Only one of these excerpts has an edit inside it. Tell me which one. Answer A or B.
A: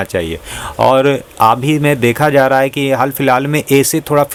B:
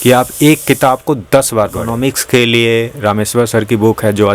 B